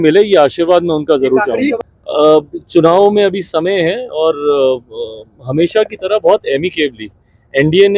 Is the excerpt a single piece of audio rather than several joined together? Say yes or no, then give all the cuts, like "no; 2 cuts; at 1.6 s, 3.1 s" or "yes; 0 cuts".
no; 1 cut; at 1.8 s